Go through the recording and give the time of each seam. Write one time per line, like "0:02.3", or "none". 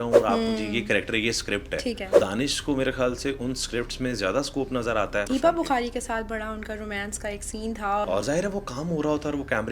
0:02.2
0:05.3
0:08.0